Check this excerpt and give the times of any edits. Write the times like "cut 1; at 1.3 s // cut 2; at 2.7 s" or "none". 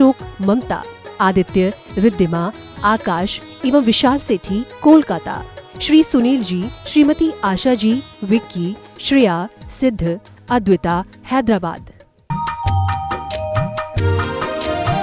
cut 1; at 12.3 s